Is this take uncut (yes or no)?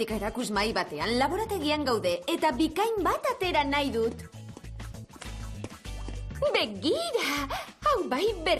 yes